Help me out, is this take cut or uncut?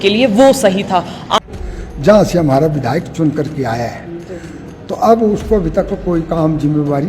cut